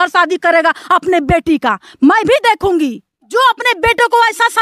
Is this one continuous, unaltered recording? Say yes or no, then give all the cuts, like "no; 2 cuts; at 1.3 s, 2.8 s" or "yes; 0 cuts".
no; 1 cut; at 3.1 s